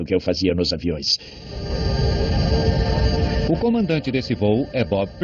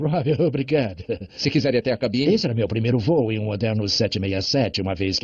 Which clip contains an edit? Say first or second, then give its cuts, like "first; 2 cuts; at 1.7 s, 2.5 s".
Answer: second; 1 cut; at 1.0 s